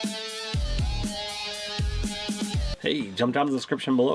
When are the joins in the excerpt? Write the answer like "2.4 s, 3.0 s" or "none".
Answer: 2.6 s